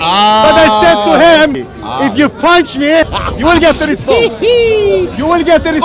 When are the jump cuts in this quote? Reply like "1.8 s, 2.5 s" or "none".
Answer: 1.5 s, 3.2 s